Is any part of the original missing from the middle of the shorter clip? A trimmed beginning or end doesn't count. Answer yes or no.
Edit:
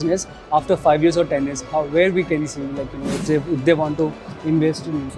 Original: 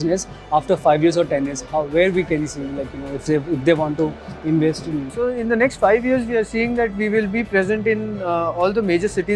no